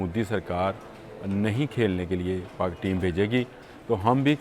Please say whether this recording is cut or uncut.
uncut